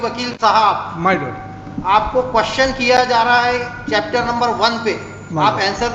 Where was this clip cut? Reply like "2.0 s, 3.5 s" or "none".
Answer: none